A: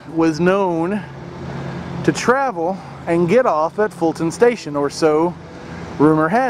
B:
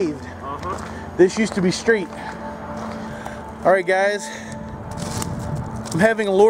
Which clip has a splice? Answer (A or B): B